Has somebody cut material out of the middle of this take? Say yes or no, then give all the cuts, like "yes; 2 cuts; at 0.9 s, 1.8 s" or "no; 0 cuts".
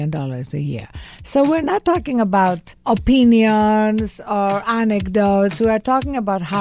yes; 1 cut; at 2.7 s